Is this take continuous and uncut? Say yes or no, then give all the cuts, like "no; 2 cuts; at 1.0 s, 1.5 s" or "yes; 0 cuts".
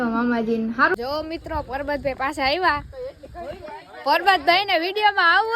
no; 1 cut; at 0.9 s